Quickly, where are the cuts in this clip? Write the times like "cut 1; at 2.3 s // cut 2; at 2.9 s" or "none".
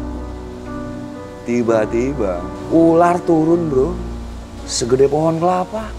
cut 1; at 2.5 s // cut 2; at 4.1 s